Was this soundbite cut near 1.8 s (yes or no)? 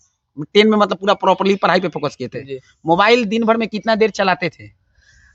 no